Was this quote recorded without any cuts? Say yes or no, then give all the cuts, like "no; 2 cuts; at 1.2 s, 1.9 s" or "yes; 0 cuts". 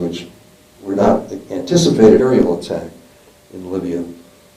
yes; 0 cuts